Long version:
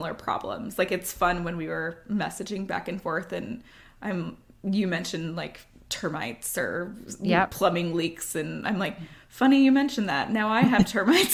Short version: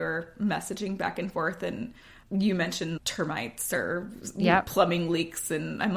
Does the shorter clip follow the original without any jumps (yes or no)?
no